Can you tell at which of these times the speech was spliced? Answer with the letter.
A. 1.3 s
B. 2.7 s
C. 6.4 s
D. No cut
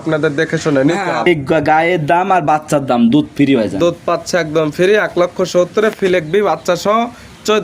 A